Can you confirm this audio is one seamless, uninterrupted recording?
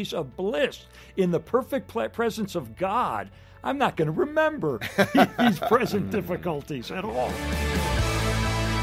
no; 1 cut; at 7.3 s

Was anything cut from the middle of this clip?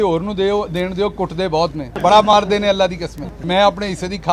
yes; 2 cuts; at 1.9 s, 3.3 s

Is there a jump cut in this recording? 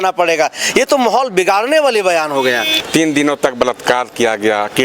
yes; 1 cut; at 2.7 s

